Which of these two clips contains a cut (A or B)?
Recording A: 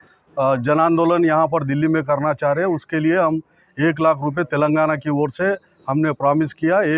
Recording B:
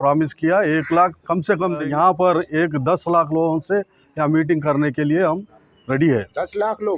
B